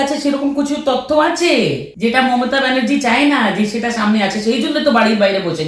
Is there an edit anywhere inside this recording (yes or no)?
yes